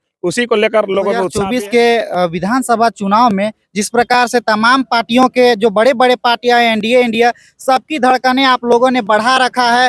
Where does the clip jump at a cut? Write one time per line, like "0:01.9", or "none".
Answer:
0:01.3